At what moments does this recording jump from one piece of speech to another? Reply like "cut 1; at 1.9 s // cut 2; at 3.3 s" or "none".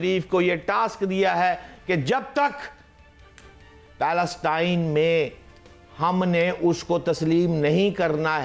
none